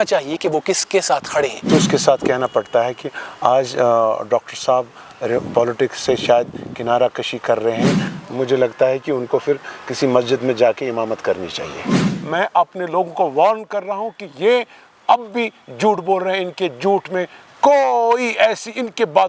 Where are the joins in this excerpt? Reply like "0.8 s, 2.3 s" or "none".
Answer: 1.6 s, 8.1 s, 12.0 s